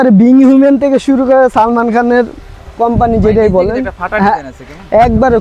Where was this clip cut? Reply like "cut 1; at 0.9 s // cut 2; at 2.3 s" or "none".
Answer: none